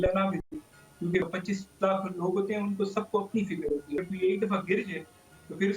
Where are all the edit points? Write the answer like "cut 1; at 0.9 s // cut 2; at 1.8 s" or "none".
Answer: cut 1; at 1.2 s // cut 2; at 4.0 s